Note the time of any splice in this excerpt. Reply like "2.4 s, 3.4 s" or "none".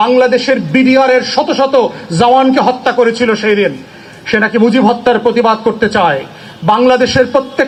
none